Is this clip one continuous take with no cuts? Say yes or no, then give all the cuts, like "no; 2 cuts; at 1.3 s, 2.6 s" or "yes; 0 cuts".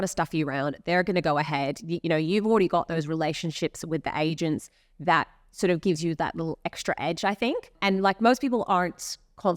no; 1 cut; at 7.7 s